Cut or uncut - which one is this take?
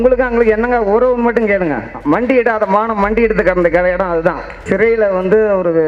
cut